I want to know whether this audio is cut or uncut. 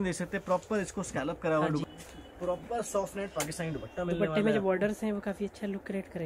cut